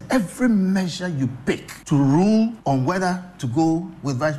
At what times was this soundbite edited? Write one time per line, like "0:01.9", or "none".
0:01.7
0:02.6